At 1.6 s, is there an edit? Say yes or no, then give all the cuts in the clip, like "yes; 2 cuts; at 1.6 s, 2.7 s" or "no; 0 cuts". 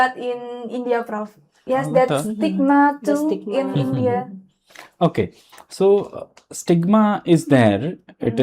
yes; 1 cut; at 1.6 s